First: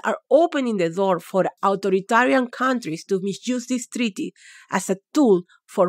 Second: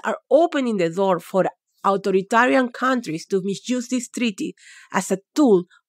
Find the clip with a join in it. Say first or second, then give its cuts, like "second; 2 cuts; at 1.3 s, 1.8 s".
first; 1 cut; at 1.5 s